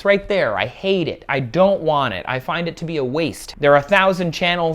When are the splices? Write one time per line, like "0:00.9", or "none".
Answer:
0:03.4